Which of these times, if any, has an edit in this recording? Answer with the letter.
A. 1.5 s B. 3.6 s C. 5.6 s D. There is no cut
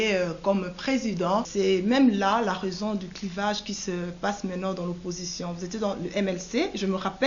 A